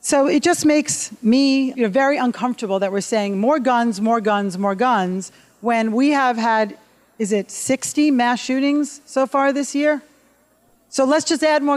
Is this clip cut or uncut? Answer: cut